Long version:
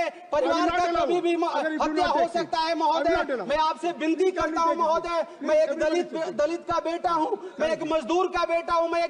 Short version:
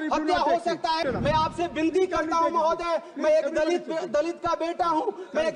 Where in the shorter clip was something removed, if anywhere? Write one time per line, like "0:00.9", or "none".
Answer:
0:01.0